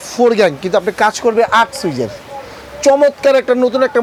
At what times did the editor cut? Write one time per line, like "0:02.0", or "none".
none